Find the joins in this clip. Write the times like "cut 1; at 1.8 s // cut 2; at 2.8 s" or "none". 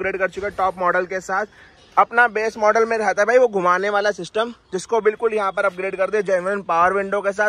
none

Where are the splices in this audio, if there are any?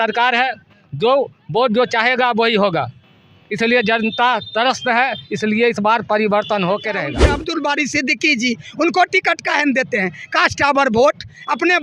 cut 1; at 7.2 s

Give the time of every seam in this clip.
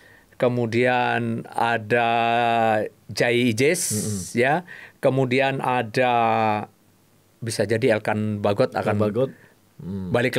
none

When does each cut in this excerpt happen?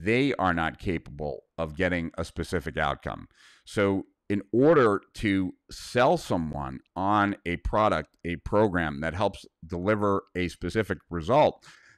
none

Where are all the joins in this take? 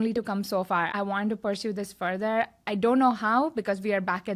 cut 1; at 0.9 s

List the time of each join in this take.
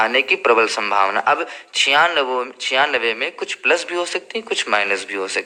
none

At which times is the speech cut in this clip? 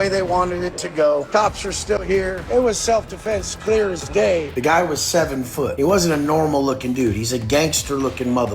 cut 1; at 1.3 s // cut 2; at 2.5 s // cut 3; at 4.5 s // cut 4; at 5.7 s

